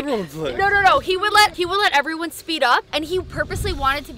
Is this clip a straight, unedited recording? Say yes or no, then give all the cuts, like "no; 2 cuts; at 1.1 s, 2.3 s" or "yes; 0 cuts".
no; 2 cuts; at 1.5 s, 2.9 s